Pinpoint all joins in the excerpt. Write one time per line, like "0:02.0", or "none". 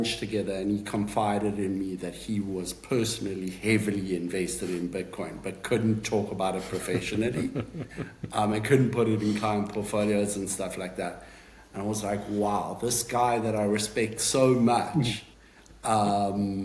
none